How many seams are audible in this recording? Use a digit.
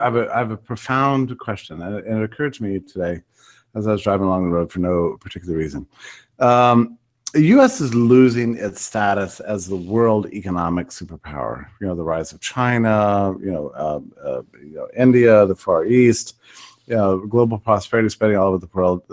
1